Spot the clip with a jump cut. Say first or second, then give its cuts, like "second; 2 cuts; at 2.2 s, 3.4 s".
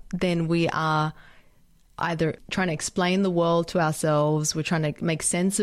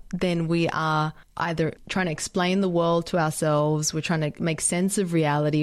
second; 1 cut; at 1.2 s